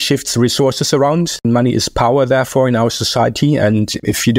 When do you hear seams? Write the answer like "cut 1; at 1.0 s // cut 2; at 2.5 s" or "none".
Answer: cut 1; at 1.4 s